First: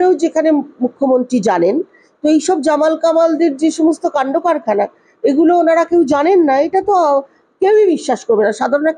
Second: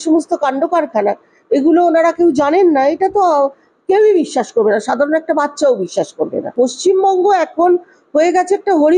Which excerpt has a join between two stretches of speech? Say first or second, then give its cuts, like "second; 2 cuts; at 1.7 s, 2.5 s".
second; 1 cut; at 6.5 s